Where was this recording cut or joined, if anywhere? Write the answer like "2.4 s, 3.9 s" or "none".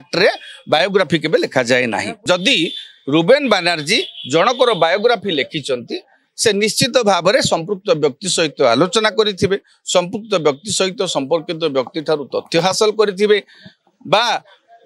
2.1 s